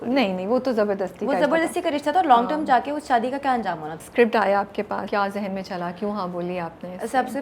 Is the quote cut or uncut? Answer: cut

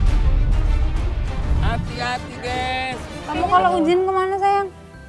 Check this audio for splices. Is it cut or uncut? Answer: cut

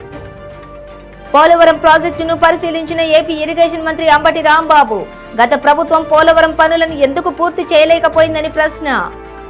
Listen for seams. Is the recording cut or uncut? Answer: uncut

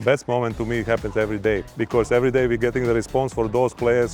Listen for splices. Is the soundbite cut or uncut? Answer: cut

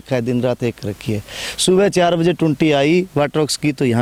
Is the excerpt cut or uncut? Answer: uncut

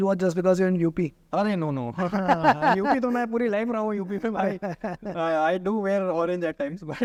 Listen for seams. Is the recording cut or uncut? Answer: uncut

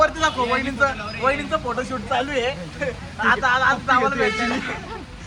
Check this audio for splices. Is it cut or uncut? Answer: uncut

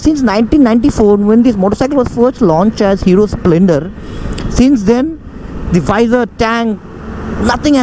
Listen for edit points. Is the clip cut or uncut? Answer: uncut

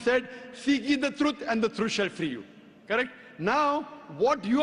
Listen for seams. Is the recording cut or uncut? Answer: cut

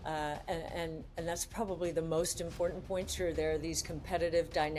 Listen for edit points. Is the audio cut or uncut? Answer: uncut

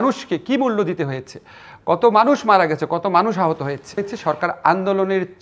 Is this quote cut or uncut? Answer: cut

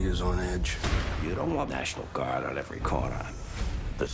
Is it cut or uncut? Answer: uncut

